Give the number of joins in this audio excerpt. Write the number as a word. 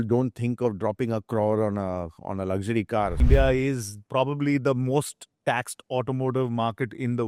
one